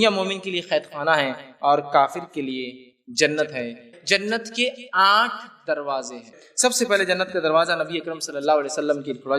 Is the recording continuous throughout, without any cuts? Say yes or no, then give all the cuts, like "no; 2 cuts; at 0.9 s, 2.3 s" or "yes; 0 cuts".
no; 2 cuts; at 3.8 s, 6.4 s